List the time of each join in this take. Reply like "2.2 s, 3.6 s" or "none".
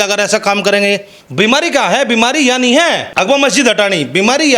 1.2 s, 3.1 s

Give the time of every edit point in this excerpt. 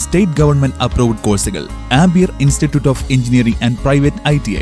none

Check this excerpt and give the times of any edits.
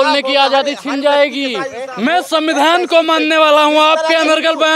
1.8 s

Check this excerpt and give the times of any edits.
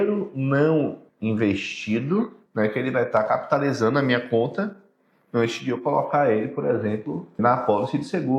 1.1 s, 2.4 s, 7.4 s

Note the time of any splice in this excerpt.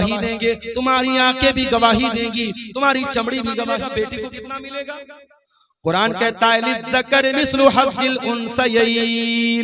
3.8 s

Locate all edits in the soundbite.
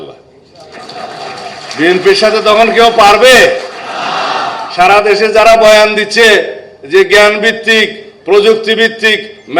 none

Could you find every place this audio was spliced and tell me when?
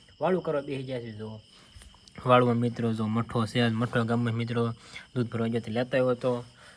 none

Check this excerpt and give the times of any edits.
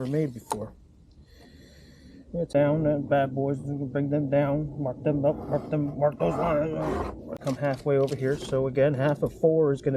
2.5 s, 7.4 s

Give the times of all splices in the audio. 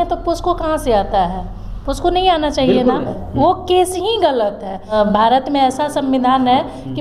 3.2 s, 4.9 s

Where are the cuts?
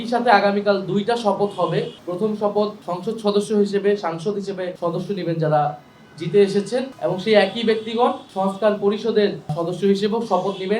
2.0 s, 2.9 s, 4.7 s, 6.9 s, 8.3 s, 9.6 s

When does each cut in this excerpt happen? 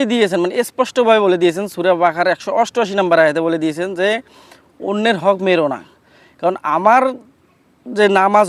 none

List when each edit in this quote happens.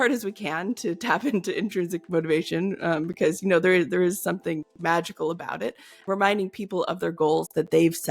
5.9 s

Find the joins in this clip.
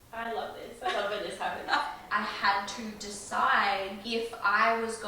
2.0 s, 4.0 s

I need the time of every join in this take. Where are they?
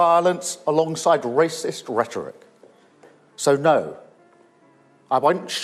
none

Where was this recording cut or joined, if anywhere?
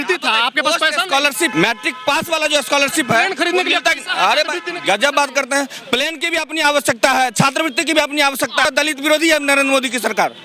1.5 s, 8.7 s

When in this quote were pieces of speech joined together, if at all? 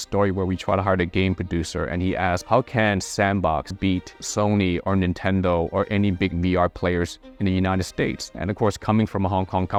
none

